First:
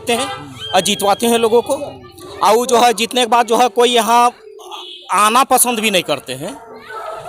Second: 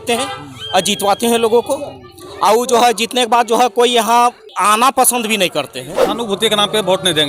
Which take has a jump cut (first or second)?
second